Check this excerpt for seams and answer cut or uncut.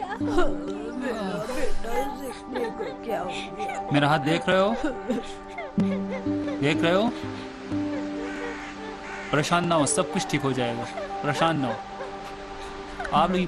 cut